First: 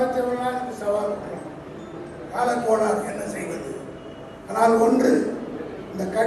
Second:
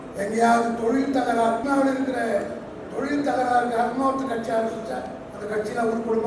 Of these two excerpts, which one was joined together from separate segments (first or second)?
second